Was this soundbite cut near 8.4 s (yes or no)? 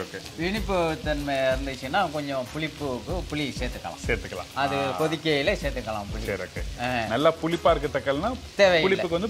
yes